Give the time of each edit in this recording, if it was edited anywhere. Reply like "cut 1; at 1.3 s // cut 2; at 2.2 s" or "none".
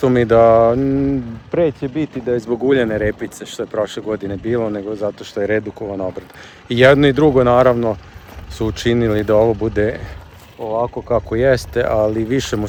none